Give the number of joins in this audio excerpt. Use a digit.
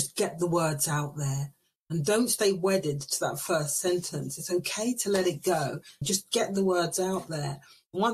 1